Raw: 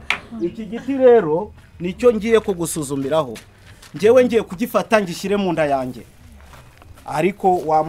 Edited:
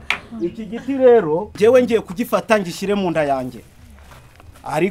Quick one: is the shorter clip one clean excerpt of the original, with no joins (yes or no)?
no